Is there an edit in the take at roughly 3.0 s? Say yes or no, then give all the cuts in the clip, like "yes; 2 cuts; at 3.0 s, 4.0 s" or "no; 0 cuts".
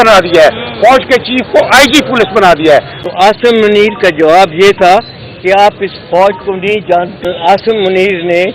yes; 2 cuts; at 3.0 s, 7.2 s